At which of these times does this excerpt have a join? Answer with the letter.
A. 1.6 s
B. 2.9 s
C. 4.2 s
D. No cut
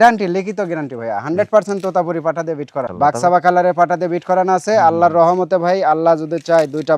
D